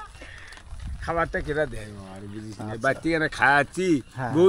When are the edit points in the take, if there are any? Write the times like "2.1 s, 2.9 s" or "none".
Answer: none